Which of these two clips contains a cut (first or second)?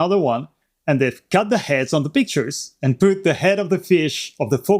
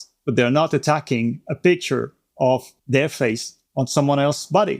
second